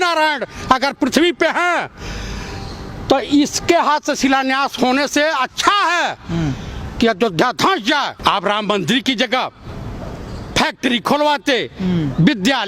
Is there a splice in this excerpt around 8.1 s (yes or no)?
yes